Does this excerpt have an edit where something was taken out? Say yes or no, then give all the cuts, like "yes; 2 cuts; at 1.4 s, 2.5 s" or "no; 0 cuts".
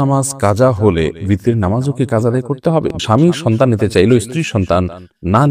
yes; 1 cut; at 2.9 s